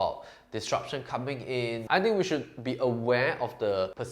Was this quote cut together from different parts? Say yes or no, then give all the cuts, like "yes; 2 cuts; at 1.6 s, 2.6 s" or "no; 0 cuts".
yes; 1 cut; at 1.8 s